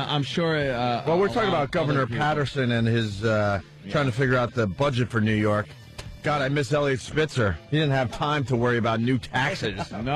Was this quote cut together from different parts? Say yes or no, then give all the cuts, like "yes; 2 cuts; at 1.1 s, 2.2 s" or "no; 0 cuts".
yes; 1 cut; at 8.9 s